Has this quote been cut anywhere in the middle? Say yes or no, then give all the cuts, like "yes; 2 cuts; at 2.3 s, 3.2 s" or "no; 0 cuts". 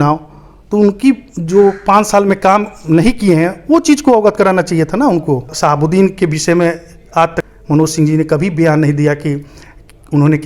yes; 2 cuts; at 5.5 s, 7.4 s